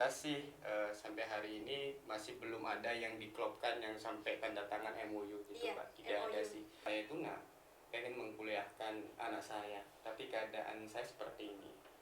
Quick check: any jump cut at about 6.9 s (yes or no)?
yes